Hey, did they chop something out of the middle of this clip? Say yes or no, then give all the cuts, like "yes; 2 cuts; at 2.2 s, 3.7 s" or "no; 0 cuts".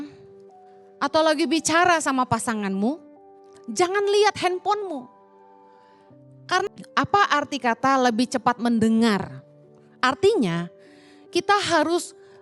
no; 0 cuts